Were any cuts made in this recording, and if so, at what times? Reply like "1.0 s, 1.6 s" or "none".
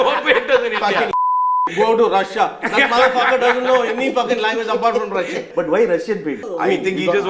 5.5 s, 6.4 s